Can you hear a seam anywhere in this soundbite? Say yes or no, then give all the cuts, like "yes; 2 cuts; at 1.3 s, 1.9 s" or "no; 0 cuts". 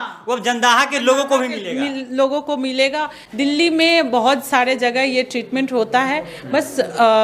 no; 0 cuts